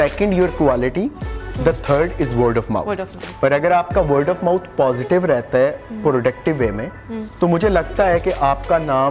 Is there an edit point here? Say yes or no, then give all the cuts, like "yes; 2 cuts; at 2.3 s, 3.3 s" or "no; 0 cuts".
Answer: no; 0 cuts